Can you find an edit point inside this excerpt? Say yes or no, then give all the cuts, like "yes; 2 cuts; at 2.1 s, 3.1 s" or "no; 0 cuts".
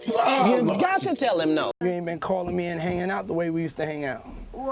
yes; 1 cut; at 1.8 s